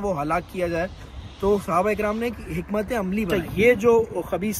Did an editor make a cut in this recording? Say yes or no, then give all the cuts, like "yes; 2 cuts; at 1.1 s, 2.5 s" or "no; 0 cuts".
yes; 1 cut; at 3.3 s